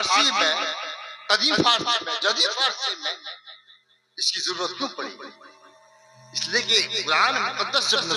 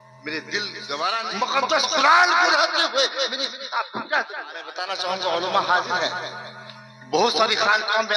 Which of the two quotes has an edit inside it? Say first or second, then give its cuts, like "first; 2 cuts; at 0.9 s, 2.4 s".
second; 2 cuts; at 1.2 s, 4.7 s